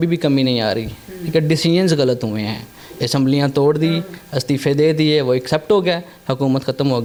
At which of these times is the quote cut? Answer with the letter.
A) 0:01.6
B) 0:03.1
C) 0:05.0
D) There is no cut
D